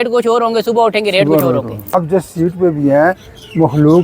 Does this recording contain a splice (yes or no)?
yes